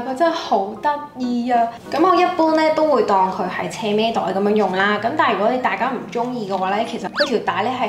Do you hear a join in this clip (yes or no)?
no